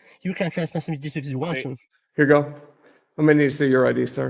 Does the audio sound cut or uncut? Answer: cut